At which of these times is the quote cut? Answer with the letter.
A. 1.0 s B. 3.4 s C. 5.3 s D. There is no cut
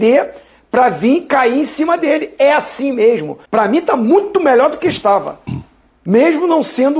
B